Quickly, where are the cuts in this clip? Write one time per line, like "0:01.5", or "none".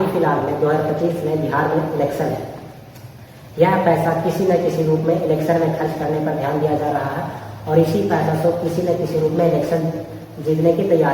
none